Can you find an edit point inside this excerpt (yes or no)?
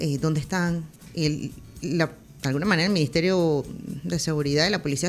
yes